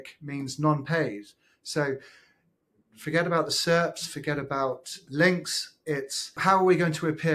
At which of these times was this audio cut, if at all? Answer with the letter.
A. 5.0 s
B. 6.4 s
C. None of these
B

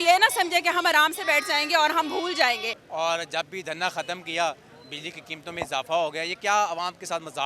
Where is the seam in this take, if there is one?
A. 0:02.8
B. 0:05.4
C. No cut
A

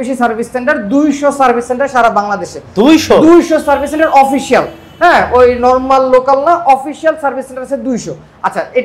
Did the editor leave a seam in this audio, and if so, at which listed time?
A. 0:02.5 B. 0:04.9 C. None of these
C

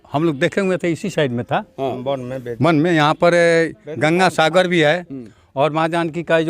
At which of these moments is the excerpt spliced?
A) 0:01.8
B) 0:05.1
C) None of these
C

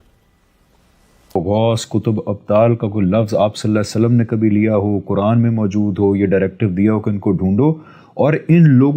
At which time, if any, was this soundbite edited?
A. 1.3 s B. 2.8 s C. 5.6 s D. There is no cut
A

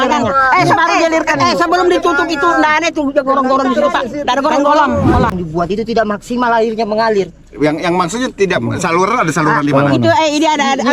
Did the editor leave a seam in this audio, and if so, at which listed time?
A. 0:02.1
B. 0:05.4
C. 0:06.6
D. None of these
B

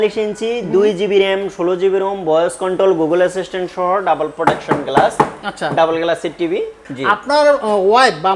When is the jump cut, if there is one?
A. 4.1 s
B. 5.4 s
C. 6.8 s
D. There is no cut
C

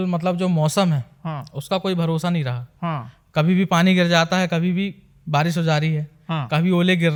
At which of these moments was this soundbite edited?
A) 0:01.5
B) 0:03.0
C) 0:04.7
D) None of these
D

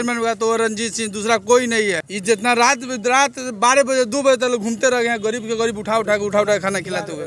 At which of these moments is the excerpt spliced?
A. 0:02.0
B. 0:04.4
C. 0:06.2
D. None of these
A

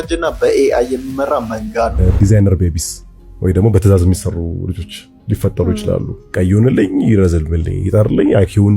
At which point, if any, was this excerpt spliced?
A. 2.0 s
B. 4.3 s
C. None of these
A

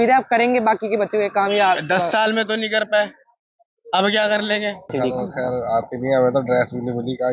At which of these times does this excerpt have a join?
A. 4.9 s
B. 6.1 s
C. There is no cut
A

